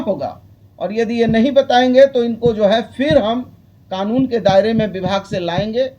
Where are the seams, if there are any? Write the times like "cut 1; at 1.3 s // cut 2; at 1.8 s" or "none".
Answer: none